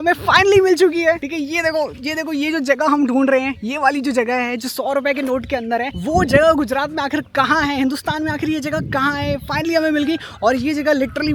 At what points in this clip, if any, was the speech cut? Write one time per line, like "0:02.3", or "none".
none